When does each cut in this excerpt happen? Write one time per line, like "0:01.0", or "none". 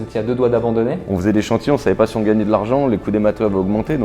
0:01.0

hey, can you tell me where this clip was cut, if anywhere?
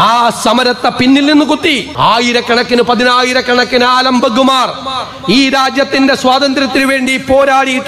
0:01.9

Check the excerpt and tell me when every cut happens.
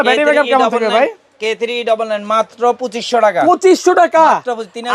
none

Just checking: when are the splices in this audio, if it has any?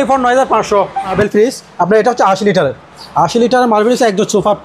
0:01.0

